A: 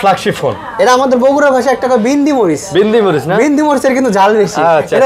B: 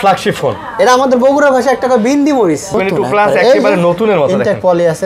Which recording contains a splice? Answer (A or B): B